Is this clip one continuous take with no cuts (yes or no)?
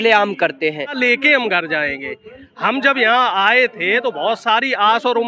no